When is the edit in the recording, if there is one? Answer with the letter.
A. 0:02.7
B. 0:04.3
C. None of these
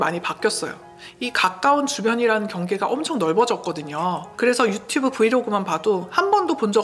B